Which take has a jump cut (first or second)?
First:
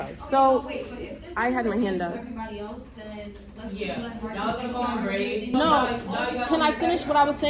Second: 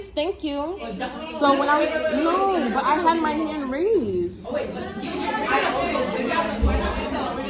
first